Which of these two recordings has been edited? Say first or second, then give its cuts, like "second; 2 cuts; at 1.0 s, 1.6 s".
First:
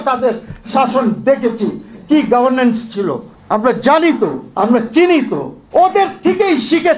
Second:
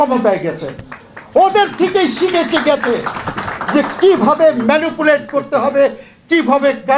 first; 3 cuts; at 3.3 s, 4.4 s, 5.5 s